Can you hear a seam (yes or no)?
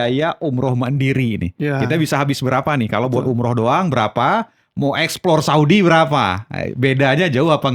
no